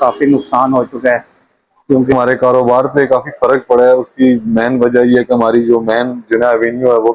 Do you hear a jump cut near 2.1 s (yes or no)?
yes